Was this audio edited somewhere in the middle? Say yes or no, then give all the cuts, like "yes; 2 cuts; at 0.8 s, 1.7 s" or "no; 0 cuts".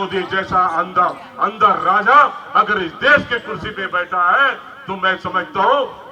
no; 0 cuts